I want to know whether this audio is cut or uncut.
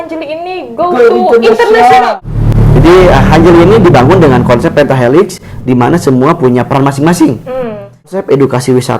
cut